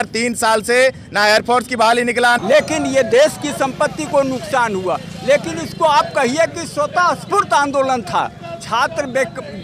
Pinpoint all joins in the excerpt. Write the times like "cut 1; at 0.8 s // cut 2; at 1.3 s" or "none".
cut 1; at 2.4 s